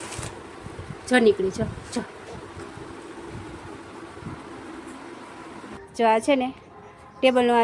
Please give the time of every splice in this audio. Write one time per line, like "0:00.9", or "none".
0:05.8